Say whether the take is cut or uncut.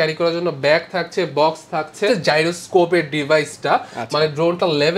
cut